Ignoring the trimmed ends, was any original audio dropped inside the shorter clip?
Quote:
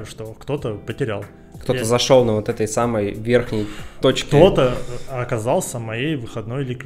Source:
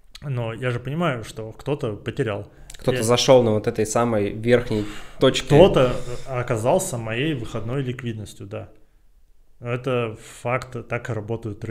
no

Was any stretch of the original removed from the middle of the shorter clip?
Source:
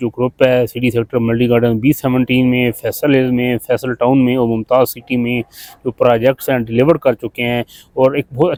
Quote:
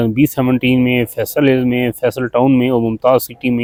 no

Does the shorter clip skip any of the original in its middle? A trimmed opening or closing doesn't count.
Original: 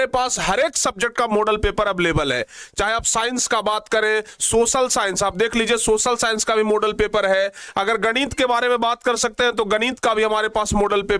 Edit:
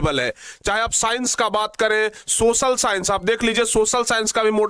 no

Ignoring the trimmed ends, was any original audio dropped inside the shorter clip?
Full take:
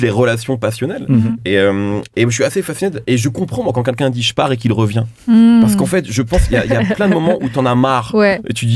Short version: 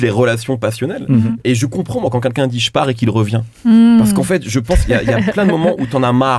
yes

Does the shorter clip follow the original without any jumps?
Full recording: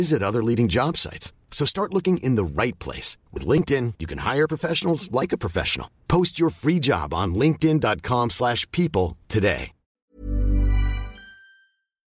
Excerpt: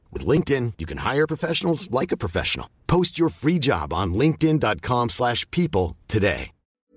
yes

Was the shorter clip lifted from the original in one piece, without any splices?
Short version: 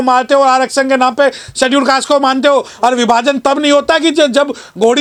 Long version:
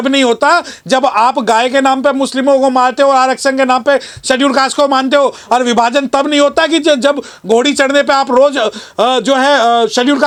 yes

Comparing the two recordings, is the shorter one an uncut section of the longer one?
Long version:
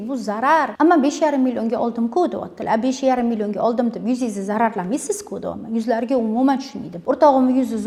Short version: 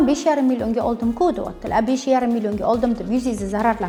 yes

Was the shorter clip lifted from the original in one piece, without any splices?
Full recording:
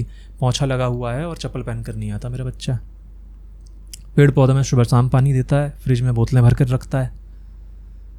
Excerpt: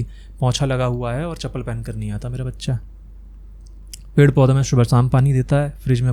yes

